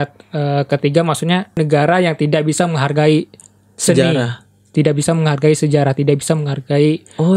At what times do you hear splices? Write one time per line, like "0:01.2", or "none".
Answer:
0:01.6